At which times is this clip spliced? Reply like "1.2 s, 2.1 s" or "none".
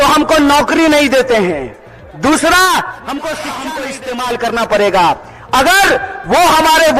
3.8 s